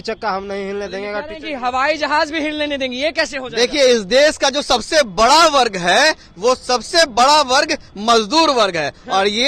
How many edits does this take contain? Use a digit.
0